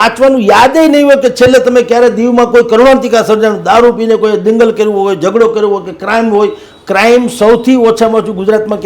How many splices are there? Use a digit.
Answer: 0